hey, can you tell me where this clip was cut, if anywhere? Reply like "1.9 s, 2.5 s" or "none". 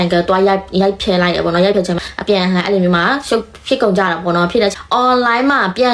1.9 s, 4.7 s